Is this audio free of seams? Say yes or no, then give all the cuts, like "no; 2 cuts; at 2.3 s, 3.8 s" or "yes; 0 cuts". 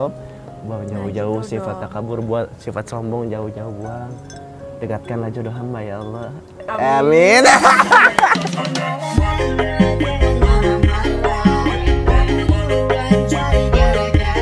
yes; 0 cuts